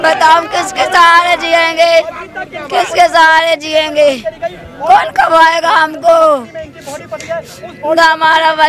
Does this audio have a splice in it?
no; 0 cuts

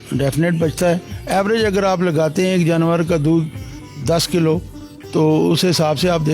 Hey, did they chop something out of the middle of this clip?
yes; 1 cut; at 1.1 s

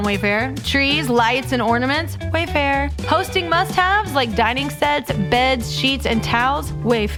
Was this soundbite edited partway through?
no; 0 cuts

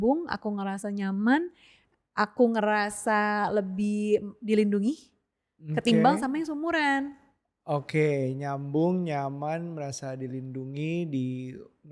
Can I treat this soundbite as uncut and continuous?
yes; 0 cuts

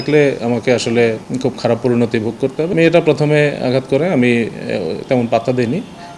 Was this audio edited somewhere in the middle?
yes; 2 cuts; at 1.3 s, 2.7 s

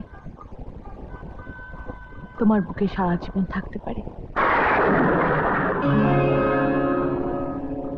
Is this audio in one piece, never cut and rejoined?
yes; 0 cuts

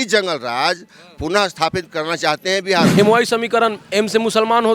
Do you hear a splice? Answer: yes; 1 cut; at 2.9 s

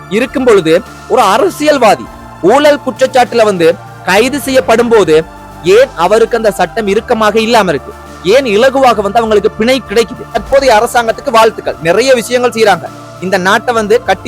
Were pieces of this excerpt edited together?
yes; 1 cut; at 10.4 s

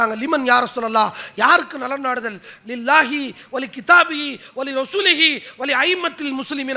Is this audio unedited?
yes; 0 cuts

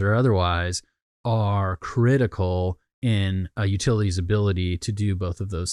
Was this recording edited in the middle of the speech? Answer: no; 0 cuts

